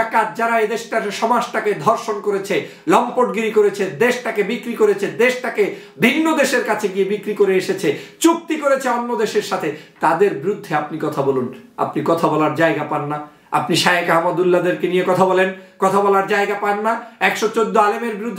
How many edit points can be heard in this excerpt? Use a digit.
0